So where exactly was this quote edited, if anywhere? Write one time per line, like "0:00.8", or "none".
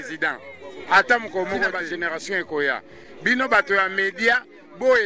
0:01.8